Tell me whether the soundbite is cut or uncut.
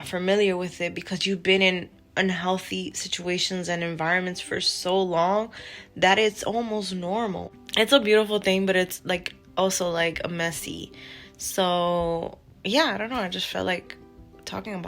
cut